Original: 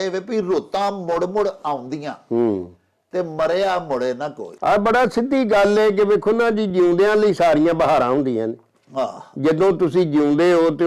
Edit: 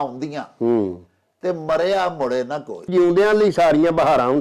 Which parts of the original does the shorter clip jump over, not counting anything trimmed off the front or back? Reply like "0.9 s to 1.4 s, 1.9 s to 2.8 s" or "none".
4.6 s to 6.7 s